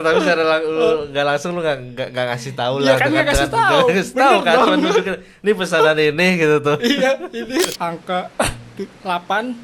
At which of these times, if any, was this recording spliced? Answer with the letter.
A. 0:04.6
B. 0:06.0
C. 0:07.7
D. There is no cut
C